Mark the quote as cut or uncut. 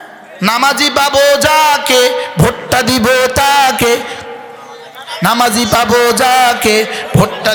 uncut